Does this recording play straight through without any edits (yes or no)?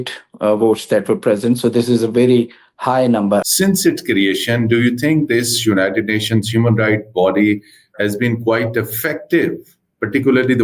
no